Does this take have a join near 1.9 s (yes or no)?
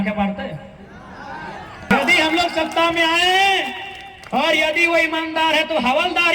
yes